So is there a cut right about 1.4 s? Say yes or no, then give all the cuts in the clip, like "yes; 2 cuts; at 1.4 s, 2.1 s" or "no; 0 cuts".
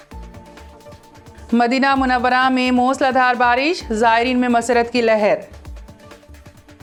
no; 0 cuts